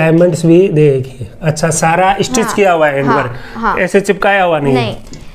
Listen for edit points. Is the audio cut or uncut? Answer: uncut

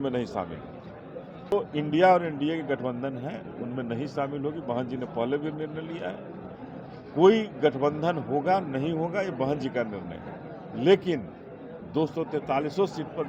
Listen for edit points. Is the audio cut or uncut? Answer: uncut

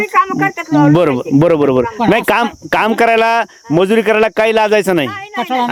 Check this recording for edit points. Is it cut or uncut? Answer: uncut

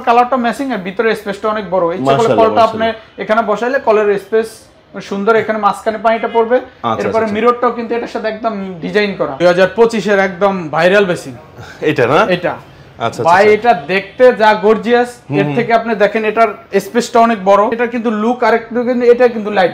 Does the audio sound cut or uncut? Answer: cut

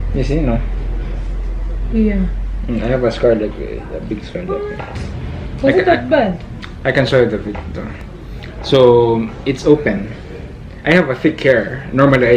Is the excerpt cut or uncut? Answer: uncut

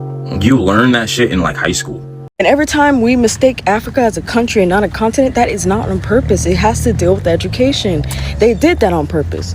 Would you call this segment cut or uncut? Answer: cut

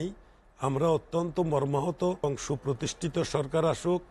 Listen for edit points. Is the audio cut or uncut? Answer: cut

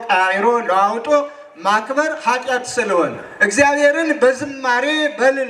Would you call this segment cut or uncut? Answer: cut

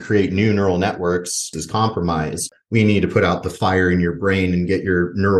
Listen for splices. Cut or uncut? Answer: cut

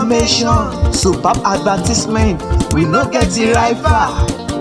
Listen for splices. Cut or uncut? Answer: uncut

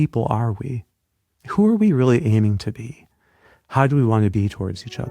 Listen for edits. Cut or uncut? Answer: uncut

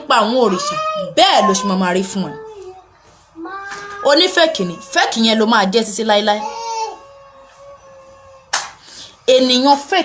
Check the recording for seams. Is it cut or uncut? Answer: uncut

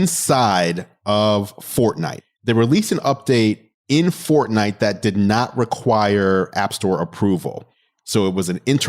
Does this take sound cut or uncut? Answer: cut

